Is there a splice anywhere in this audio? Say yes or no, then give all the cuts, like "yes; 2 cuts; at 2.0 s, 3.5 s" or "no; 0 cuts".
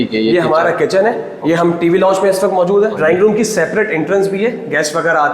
yes; 2 cuts; at 1.3 s, 3.0 s